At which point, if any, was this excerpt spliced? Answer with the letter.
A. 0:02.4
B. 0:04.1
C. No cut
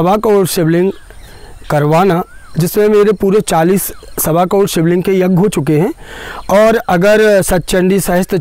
C